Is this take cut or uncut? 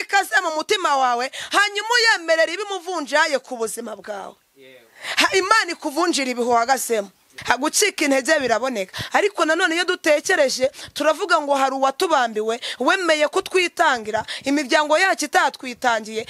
cut